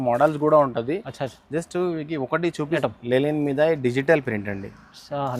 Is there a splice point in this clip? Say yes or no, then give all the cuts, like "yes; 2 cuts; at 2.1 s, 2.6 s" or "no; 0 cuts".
yes; 1 cut; at 2.8 s